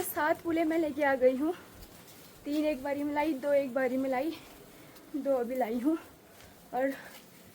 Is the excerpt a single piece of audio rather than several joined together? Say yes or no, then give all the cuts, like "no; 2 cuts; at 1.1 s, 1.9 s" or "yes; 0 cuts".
yes; 0 cuts